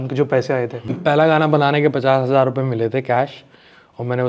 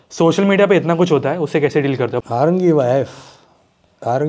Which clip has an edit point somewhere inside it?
second; 1 cut; at 2.2 s

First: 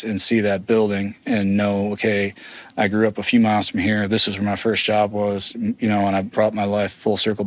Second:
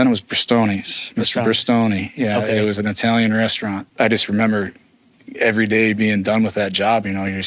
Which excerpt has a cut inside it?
second; 1 cut; at 3.8 s

